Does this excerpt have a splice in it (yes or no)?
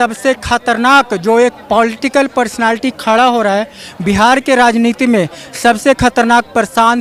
no